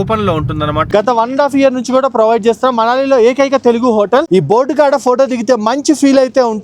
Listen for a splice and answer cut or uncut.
cut